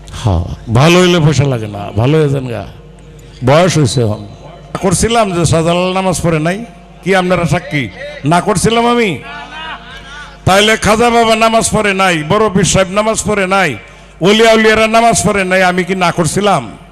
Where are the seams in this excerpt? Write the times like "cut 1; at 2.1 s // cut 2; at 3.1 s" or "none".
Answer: cut 1; at 4.8 s